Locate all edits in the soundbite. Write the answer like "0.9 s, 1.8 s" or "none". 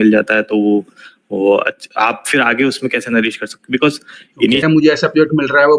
4.6 s